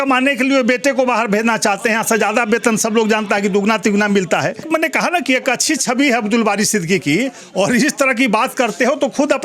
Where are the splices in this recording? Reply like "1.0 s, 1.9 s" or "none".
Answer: 4.6 s